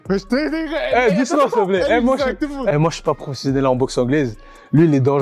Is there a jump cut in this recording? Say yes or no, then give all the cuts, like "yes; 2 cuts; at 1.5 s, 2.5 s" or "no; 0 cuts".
no; 0 cuts